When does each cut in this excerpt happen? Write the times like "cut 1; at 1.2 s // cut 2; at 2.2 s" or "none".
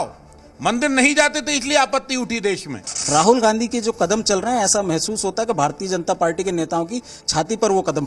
cut 1; at 2.9 s